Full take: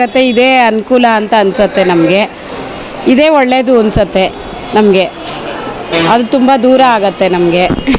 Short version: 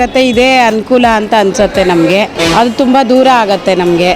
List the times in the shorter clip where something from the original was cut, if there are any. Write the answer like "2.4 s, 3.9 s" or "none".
2.3 s

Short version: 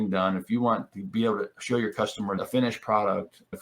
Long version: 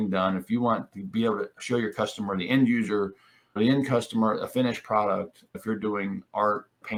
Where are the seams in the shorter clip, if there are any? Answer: 2.4 s

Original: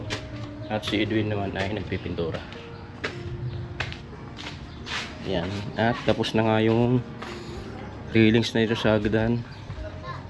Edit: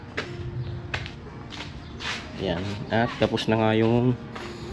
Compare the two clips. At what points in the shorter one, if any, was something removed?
none

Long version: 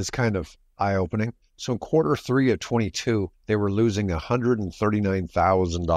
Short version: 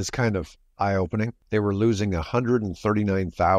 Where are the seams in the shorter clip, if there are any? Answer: 1.4 s

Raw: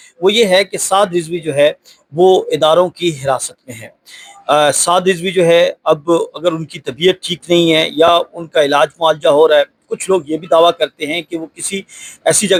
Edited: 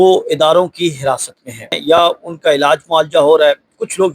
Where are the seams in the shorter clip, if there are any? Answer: 1.8 s

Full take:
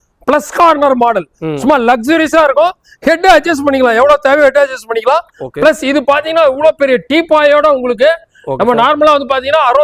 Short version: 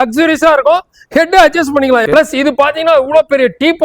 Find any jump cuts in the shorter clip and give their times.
2.0 s

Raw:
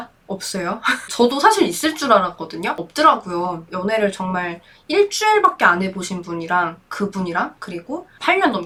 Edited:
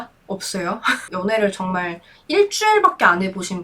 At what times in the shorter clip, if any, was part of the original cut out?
1.1 s

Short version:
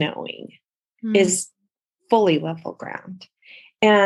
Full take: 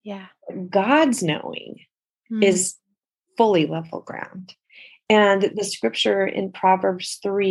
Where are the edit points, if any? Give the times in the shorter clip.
none

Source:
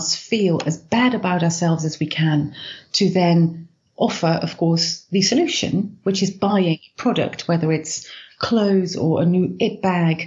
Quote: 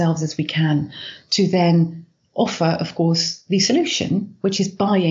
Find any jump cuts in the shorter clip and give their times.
none

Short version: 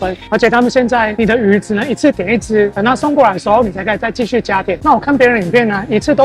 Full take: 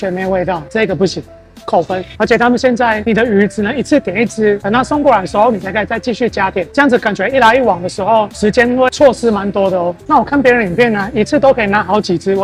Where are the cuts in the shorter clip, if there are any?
4.8 s

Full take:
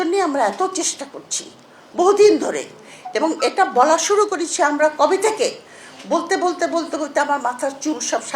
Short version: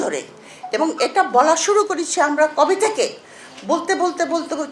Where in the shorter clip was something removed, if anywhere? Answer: none

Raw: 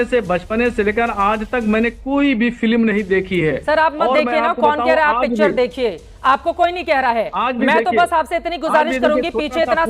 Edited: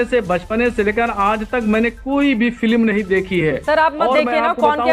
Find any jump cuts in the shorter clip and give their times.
none

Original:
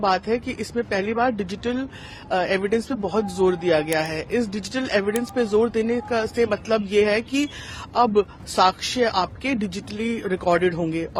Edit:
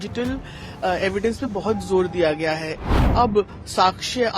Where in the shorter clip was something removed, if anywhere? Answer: 2.8 s

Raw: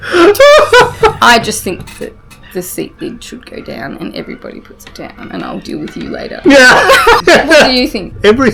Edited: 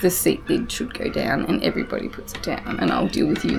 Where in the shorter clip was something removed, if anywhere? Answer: none

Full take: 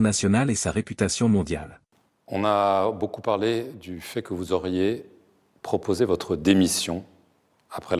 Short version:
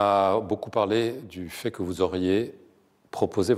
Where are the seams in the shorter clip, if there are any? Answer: none

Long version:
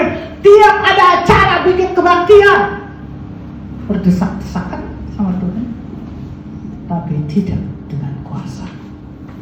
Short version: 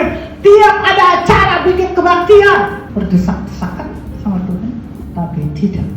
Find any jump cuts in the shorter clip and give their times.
2.8 s, 5.0 s

